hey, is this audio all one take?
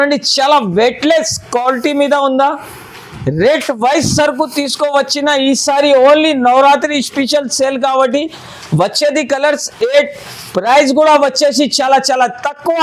yes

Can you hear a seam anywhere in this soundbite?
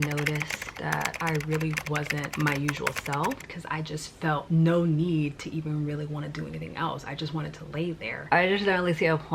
yes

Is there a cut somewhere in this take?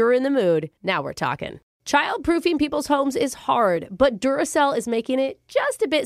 yes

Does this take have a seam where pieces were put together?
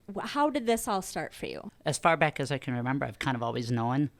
yes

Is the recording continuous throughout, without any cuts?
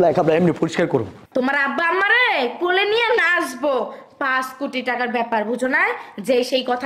no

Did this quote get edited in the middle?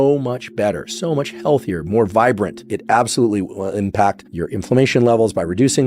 yes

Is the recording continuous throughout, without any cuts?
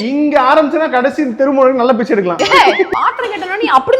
no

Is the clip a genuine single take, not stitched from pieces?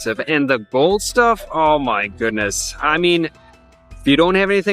yes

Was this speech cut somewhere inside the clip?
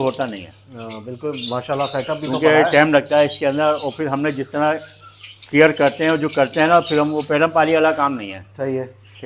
no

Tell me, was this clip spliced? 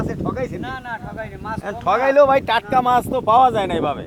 no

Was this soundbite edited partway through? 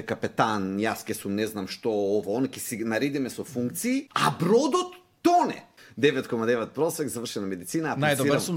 yes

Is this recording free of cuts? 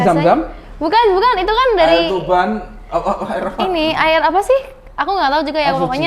yes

